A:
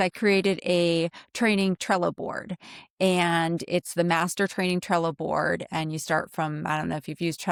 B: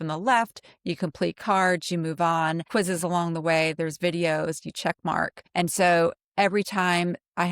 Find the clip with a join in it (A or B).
B